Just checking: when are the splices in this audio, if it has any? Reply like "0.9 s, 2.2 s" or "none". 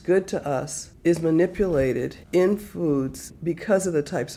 3.3 s